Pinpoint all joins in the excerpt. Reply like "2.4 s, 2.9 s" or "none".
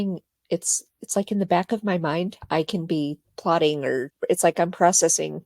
3.3 s, 4.1 s